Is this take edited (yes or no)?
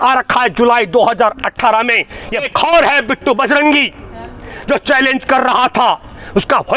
yes